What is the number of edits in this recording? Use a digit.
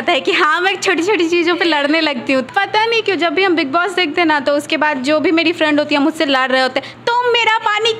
1